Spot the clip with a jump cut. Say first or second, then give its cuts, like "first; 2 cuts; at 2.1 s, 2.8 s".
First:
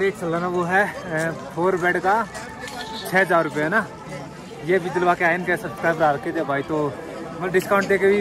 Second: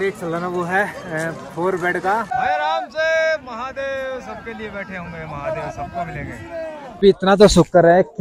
second; 2 cuts; at 2.3 s, 7.0 s